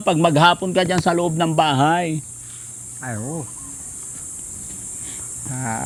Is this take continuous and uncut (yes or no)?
yes